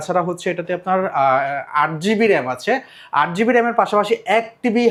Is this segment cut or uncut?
uncut